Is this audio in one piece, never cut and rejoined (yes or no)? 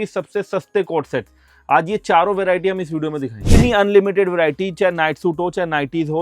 no